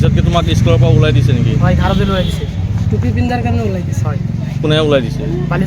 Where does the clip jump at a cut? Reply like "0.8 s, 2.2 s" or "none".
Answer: none